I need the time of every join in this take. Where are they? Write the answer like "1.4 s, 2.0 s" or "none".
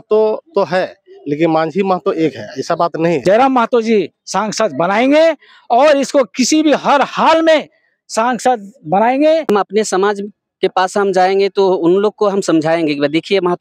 3.2 s, 9.4 s